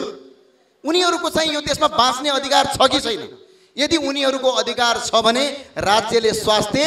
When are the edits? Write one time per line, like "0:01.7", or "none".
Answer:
none